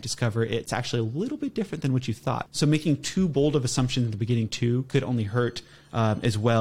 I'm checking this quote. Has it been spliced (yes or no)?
yes